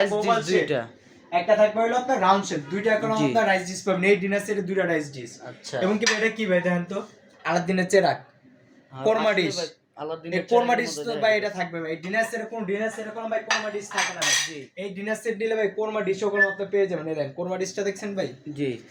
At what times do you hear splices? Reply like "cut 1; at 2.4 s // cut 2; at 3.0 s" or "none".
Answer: none

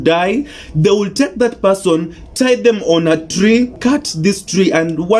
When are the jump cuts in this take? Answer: cut 1; at 3.7 s

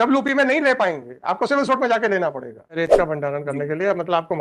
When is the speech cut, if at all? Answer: cut 1; at 2.8 s

